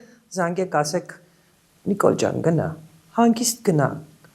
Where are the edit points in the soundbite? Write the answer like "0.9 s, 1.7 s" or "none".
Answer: none